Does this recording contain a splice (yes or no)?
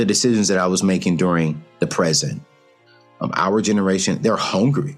yes